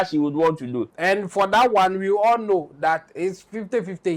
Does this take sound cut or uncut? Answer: cut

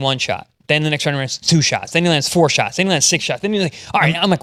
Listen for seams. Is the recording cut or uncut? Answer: uncut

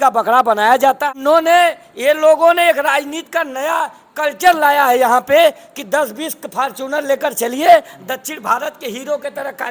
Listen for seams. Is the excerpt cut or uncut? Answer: cut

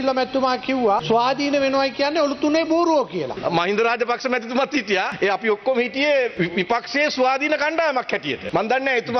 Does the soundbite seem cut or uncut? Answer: cut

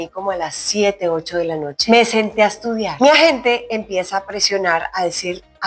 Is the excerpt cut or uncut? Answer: cut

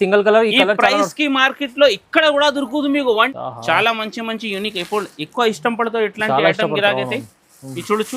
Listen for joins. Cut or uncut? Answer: cut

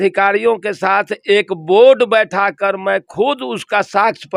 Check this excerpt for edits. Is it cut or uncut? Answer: uncut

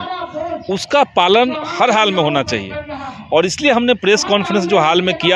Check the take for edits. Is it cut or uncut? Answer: uncut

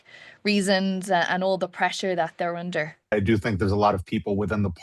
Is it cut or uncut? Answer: cut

